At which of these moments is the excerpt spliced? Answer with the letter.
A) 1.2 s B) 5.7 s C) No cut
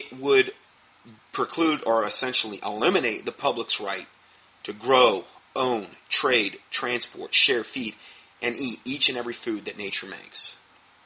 B